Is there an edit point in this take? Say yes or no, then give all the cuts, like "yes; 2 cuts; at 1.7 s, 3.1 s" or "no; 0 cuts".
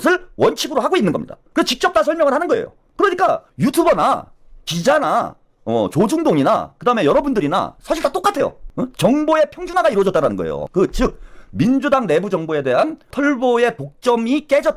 yes; 4 cuts; at 1.3 s, 8.6 s, 10.6 s, 13.1 s